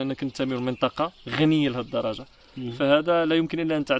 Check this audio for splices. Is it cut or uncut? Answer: uncut